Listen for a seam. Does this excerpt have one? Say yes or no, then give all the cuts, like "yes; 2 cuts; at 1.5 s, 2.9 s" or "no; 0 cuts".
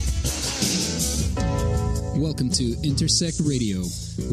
no; 0 cuts